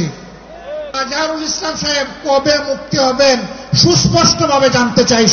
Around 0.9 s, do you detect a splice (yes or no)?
yes